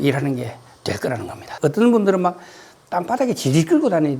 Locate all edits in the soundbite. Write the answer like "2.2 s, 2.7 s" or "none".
1.5 s